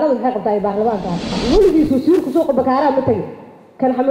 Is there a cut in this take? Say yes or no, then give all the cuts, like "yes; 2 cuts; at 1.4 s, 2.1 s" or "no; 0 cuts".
yes; 1 cut; at 1.4 s